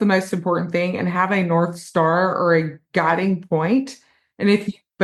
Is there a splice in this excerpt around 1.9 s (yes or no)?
no